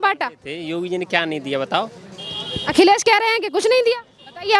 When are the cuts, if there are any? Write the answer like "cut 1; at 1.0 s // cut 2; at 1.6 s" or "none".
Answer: none